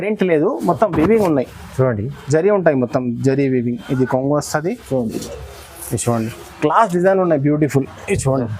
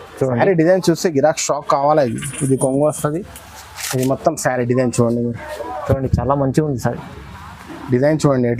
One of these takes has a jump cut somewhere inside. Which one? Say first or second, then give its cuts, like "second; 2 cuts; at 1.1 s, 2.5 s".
first; 1 cut; at 6.4 s